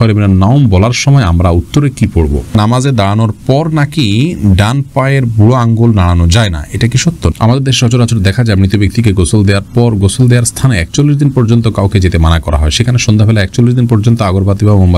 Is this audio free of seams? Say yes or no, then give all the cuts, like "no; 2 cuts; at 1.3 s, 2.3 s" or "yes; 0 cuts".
no; 2 cuts; at 2.5 s, 7.3 s